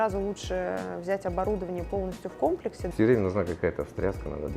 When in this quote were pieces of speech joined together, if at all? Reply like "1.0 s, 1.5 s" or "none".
2.8 s